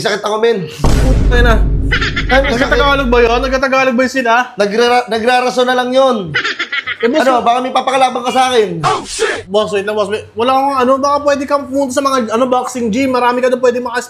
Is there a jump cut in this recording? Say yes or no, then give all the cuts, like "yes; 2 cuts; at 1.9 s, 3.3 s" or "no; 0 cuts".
no; 0 cuts